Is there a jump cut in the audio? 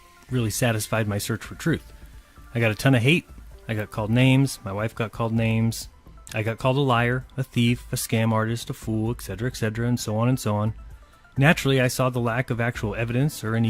yes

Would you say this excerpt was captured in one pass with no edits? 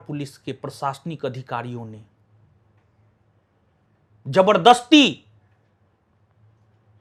yes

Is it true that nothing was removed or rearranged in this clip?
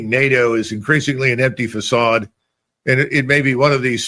yes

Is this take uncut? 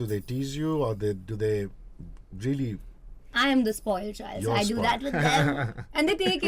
yes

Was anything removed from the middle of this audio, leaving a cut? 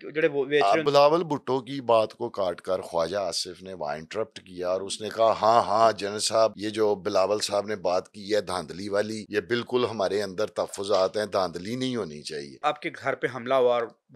yes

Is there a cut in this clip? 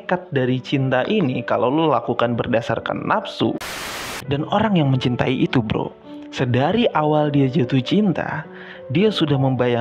yes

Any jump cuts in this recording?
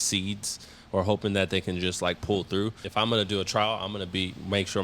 yes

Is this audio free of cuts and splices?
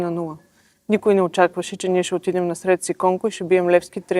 yes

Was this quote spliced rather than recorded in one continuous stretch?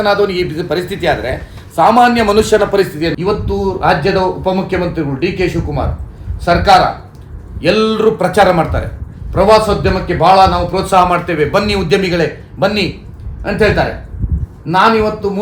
yes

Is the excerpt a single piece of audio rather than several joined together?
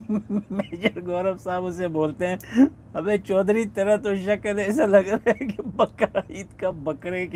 yes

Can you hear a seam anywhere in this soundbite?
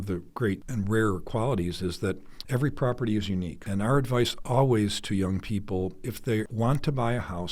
no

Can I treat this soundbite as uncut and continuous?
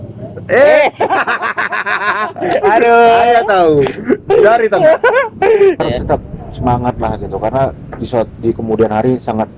no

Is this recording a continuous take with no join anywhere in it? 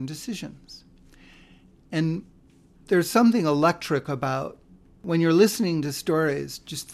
no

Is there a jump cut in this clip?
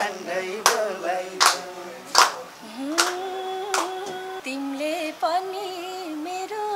yes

